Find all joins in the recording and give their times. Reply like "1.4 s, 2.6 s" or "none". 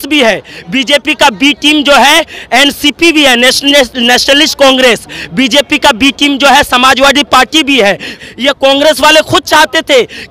none